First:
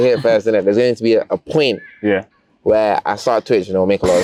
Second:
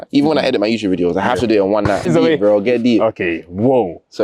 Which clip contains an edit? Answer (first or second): second